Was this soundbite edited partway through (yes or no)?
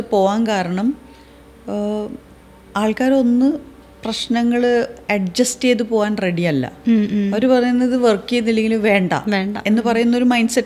no